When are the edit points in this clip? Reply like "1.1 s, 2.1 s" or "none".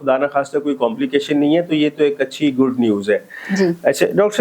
none